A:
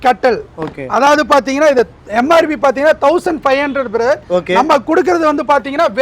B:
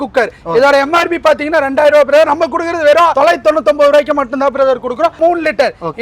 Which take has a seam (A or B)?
B